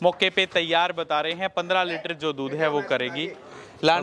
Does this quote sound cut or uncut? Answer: uncut